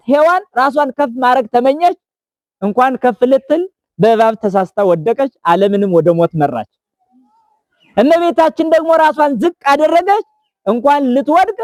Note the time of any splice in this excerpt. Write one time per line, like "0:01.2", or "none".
none

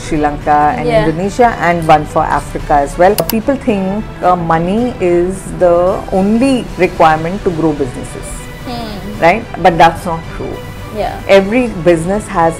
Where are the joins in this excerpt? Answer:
0:03.3

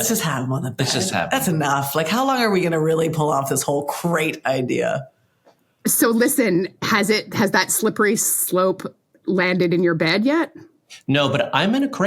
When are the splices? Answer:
none

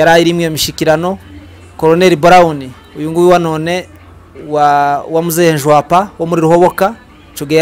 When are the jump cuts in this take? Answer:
none

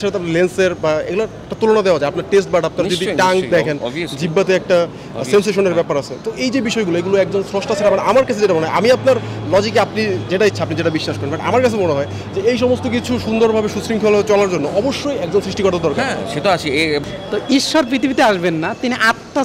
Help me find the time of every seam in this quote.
0:17.0

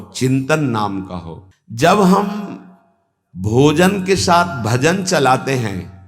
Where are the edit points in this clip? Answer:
none

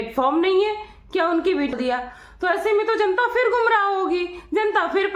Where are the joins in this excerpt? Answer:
0:01.7

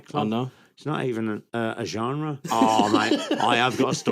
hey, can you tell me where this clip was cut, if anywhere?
0:02.5

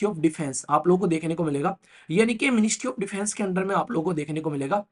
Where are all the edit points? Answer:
none

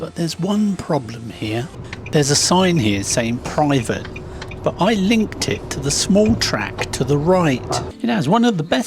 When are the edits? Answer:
0:01.8
0:07.9

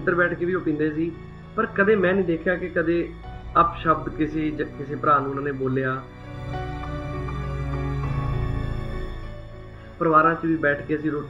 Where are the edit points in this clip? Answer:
0:06.3
0:08.0
0:09.8

